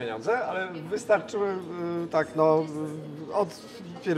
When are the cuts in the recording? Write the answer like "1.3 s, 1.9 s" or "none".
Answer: none